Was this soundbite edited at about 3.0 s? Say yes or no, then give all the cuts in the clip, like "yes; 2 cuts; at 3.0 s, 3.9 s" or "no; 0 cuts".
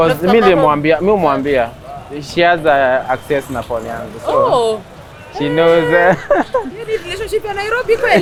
no; 0 cuts